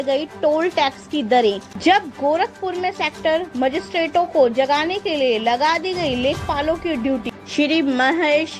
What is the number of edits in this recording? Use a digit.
2